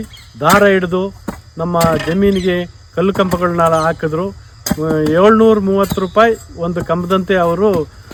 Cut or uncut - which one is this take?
uncut